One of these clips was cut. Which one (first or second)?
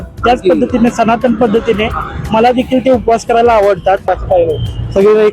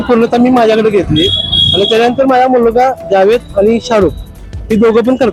first